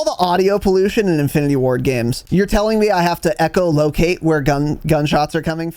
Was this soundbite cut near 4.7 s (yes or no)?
no